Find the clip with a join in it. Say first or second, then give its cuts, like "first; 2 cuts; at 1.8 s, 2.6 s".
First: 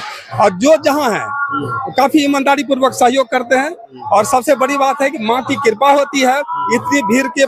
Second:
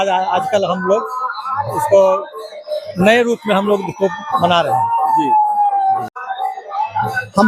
second; 1 cut; at 6.1 s